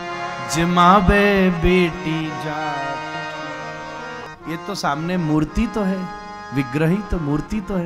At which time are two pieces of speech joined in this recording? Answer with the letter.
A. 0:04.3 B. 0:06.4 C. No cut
A